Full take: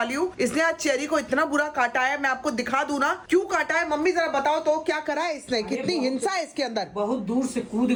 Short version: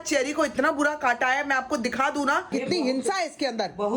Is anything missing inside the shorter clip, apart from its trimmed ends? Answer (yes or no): yes